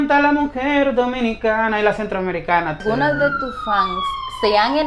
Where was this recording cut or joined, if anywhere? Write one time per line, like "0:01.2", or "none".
0:02.8